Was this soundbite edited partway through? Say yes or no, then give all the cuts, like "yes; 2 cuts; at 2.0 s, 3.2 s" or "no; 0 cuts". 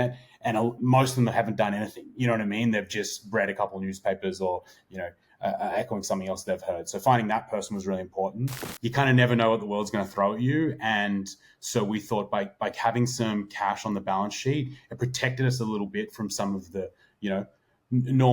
yes; 1 cut; at 8.6 s